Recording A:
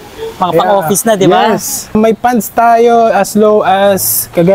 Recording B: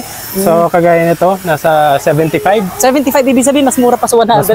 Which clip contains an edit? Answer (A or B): A